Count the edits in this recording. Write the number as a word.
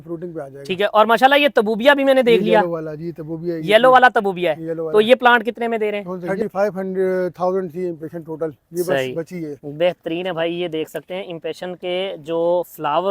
one